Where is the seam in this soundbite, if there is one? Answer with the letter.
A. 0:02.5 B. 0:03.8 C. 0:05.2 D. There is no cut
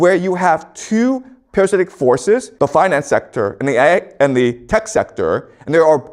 A